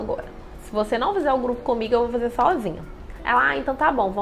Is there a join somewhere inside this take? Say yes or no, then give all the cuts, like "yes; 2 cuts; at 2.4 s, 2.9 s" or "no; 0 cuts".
no; 0 cuts